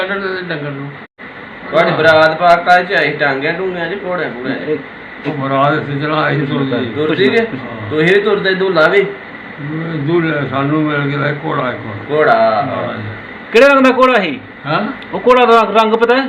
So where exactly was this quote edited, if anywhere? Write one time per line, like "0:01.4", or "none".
0:01.0